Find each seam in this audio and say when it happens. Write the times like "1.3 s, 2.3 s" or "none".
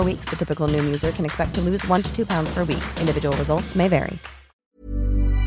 4.5 s